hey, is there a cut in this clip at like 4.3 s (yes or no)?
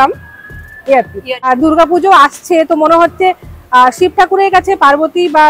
no